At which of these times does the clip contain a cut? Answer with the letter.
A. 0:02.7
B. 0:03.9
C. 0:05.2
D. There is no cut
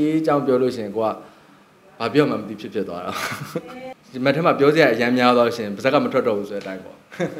B